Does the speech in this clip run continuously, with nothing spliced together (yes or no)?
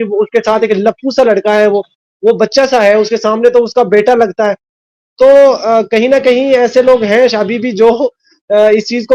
yes